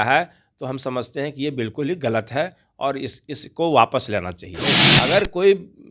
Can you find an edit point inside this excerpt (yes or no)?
yes